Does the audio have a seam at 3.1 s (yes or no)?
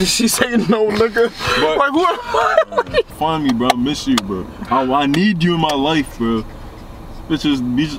yes